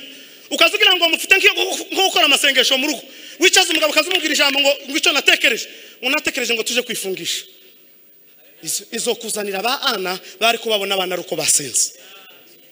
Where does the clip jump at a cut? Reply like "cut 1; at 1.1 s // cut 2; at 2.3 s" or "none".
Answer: none

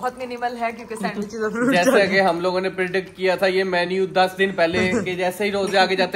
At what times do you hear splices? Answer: none

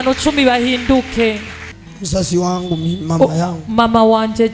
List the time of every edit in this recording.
cut 1; at 1.8 s

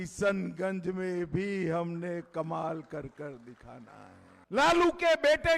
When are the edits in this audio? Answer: cut 1; at 4.3 s

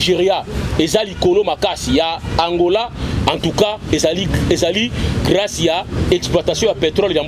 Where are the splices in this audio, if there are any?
none

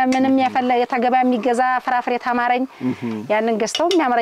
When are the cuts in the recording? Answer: none

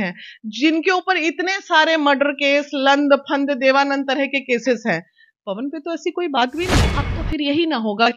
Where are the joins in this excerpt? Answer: cut 1; at 6.9 s

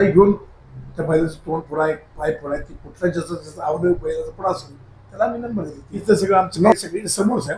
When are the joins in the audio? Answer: cut 1; at 6.0 s

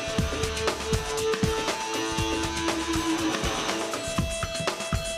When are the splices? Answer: cut 1; at 4.0 s

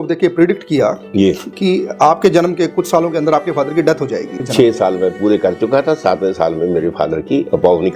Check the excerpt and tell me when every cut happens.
cut 1; at 4.4 s

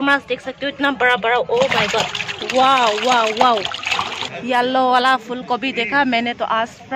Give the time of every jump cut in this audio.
cut 1; at 4.3 s

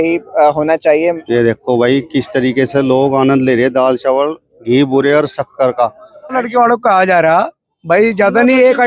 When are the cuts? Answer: cut 1; at 1.2 s // cut 2; at 6.3 s

